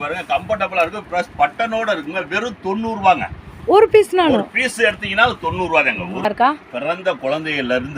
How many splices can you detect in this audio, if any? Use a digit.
1